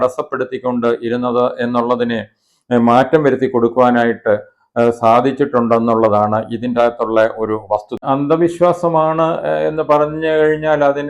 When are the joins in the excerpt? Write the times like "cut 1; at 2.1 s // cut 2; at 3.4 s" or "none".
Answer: cut 1; at 8.0 s

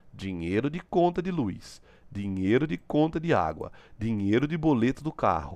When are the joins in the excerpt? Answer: none

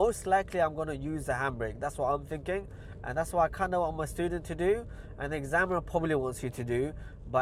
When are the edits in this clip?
none

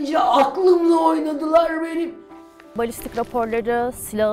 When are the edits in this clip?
cut 1; at 2.3 s

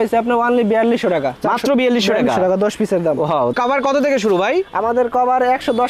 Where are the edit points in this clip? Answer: cut 1; at 3.5 s

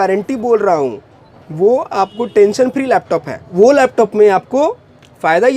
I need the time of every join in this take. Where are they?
none

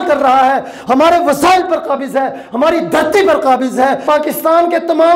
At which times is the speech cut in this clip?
cut 1; at 4.0 s

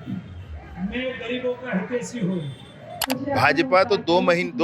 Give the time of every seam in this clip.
cut 1; at 3.0 s

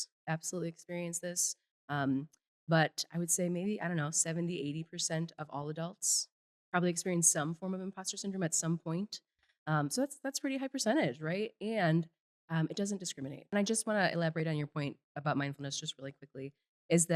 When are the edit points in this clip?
cut 1; at 13.5 s

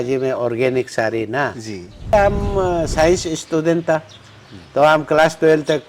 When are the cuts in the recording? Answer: cut 1; at 2.1 s

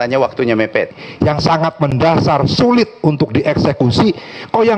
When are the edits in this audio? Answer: cut 1; at 1.0 s

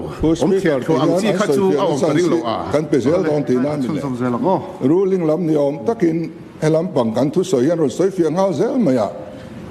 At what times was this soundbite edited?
cut 1; at 3.9 s

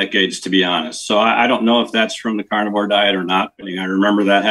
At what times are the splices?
cut 1; at 3.6 s

